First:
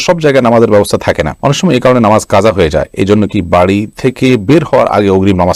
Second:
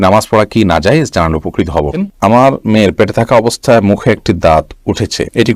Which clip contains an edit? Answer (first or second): second